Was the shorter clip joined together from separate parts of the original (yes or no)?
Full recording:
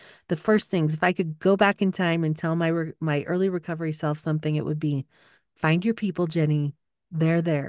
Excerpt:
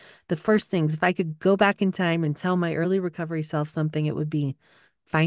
yes